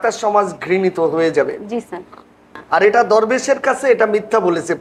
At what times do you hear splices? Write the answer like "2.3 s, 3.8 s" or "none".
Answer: 2.6 s